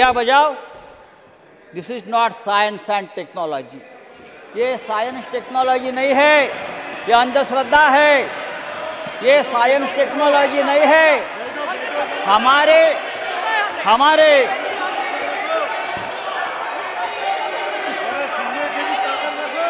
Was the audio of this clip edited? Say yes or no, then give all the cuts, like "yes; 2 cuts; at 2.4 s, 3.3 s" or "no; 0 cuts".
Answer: no; 0 cuts